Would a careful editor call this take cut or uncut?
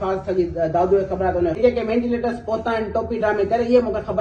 cut